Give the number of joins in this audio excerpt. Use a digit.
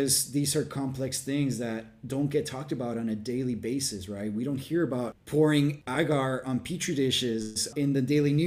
3